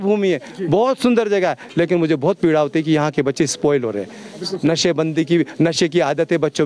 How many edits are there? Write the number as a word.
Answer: zero